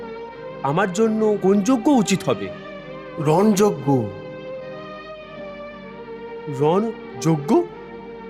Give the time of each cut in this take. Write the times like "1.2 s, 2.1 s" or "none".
none

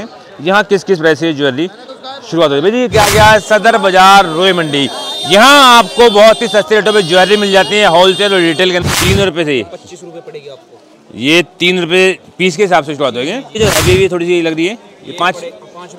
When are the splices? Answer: 2.9 s, 8.8 s, 13.6 s

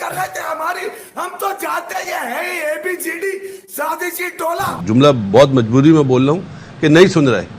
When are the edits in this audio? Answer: 4.7 s

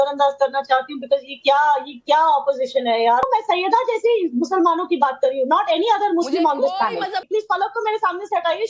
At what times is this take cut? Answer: 3.2 s, 7.2 s

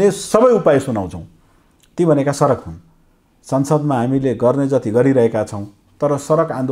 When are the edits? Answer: none

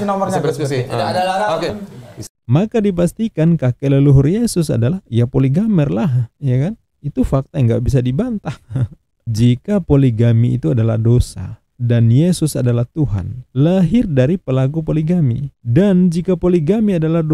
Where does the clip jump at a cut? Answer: 2.3 s, 9.2 s

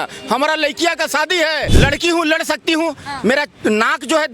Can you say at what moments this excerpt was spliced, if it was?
1.7 s

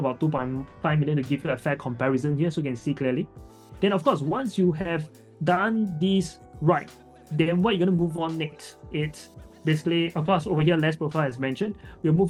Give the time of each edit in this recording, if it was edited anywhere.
none

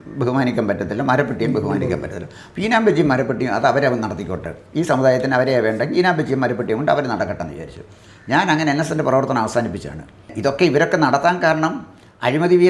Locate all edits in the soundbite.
10.3 s

